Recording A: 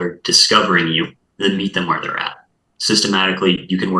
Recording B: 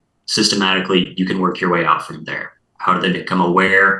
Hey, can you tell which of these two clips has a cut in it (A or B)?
A